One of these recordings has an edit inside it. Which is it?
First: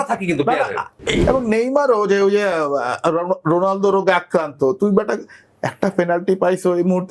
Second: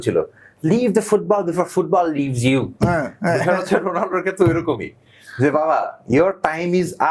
first; 1 cut; at 1.2 s

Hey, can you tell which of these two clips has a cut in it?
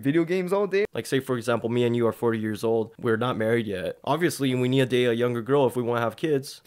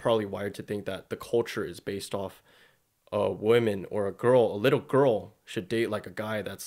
first; 3 cuts; at 0.9 s, 2.9 s, 3.9 s

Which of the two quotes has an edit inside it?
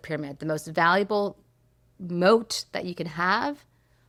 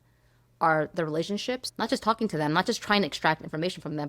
second; 1 cut; at 1.7 s

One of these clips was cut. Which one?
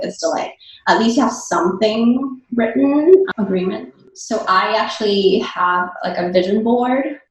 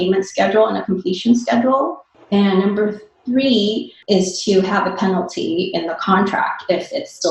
first; 1 cut; at 3.9 s

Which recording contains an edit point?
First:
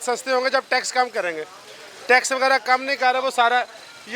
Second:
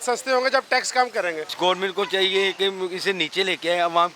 second; 1 cut; at 1.4 s

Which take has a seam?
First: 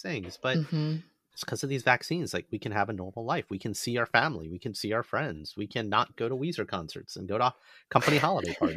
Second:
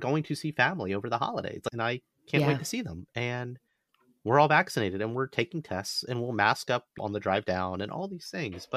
second; 2 cuts; at 1.6 s, 6.9 s

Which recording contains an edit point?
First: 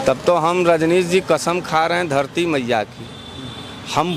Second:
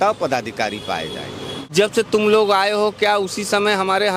second; 1 cut; at 1.7 s

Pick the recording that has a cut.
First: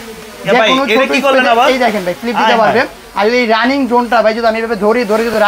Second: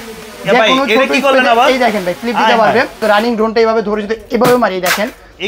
second; 1 cut; at 3.0 s

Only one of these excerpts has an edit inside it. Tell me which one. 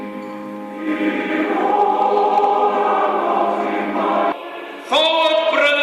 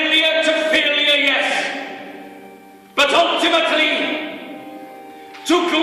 first; 1 cut; at 4.2 s

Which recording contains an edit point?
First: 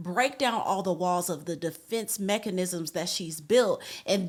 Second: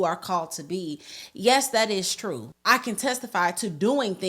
second; 1 cut; at 2.5 s

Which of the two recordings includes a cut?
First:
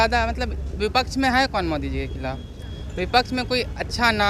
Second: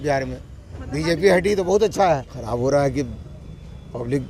second; 1 cut; at 2.3 s

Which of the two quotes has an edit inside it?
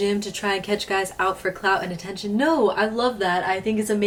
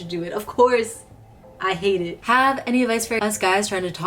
second; 1 cut; at 2.2 s

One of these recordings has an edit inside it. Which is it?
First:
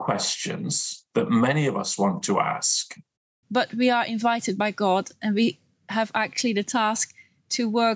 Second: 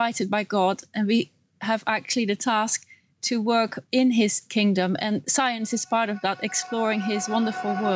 first; 2 cuts; at 0.9 s, 3.3 s

